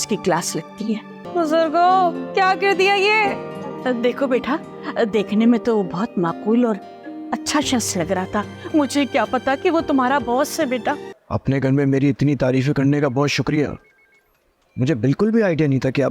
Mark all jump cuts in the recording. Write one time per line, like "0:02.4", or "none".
0:01.2
0:11.1